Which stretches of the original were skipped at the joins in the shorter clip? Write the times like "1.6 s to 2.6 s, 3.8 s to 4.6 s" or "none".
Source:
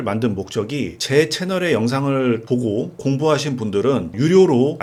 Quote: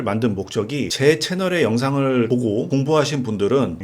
0.9 s to 1.0 s, 2.5 s to 2.7 s